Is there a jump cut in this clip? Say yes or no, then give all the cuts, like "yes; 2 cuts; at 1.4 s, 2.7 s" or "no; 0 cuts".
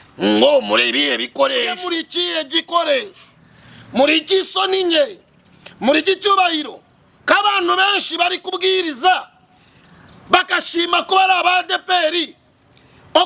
yes; 1 cut; at 1.9 s